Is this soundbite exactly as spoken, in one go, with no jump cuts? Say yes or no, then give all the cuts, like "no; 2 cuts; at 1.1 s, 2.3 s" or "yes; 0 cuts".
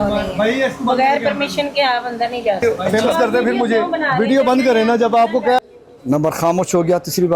no; 2 cuts; at 2.6 s, 5.6 s